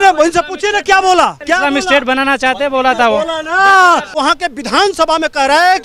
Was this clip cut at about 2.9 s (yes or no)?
no